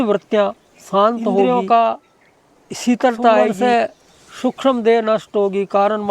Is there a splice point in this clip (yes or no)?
yes